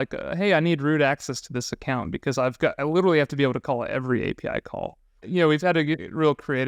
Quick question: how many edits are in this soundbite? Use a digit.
1